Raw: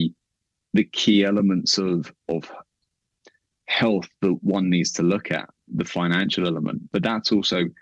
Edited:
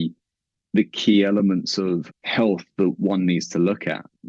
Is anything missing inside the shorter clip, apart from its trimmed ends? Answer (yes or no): yes